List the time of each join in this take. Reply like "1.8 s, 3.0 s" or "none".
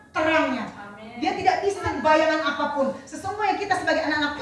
1.9 s